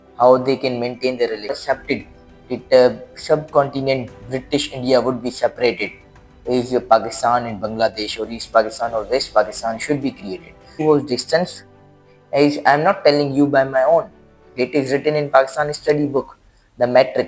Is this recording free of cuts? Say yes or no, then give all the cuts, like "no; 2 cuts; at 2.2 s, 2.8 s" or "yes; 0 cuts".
no; 2 cuts; at 1.7 s, 10.7 s